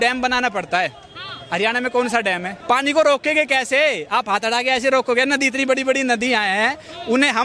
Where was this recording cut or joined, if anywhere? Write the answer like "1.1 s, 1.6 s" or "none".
2.5 s